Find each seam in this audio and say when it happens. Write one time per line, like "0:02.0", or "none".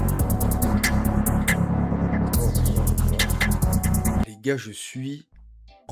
none